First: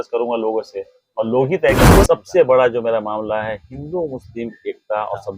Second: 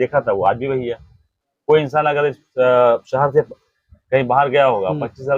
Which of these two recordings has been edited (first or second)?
first